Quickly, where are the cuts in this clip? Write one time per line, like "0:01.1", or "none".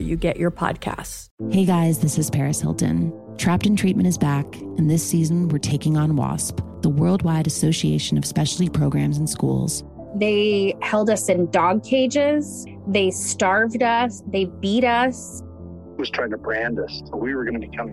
0:01.2